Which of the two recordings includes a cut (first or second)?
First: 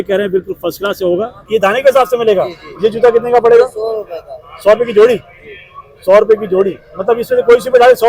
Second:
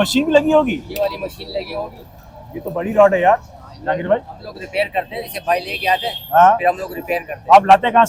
first